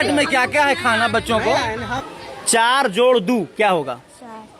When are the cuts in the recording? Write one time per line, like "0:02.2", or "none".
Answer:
0:01.9